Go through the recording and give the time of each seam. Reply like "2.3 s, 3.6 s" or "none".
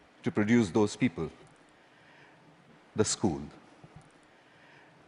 none